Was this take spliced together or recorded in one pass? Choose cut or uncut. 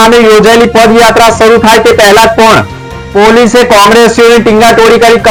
uncut